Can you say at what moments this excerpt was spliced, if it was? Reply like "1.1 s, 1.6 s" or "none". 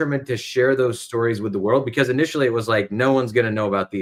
none